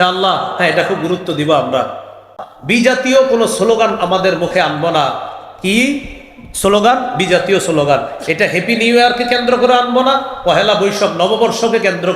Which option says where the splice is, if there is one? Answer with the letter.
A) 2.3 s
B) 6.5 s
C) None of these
A